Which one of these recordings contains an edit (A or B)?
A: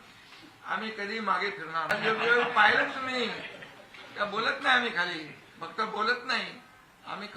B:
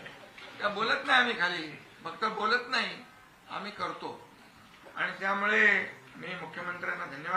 A